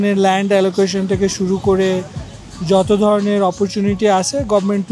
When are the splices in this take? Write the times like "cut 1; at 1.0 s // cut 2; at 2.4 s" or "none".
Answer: none